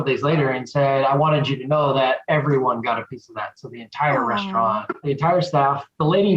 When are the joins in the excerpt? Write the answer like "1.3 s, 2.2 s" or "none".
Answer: 5.0 s